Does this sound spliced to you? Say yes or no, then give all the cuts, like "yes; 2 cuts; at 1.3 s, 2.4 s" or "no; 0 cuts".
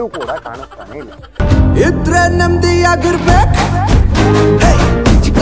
no; 0 cuts